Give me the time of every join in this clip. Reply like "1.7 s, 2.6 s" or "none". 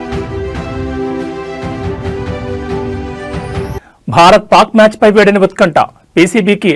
3.3 s